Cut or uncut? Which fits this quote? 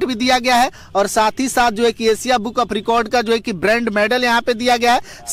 uncut